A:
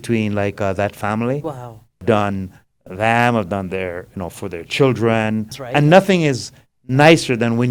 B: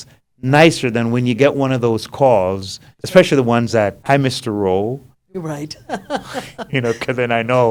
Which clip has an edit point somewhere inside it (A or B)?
A